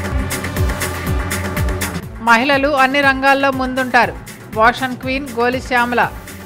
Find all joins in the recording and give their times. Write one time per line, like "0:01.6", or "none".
0:01.9